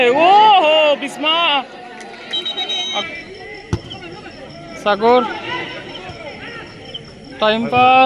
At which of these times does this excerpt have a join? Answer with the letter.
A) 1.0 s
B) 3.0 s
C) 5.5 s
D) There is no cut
B